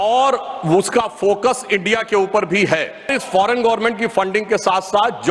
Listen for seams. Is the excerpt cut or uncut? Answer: cut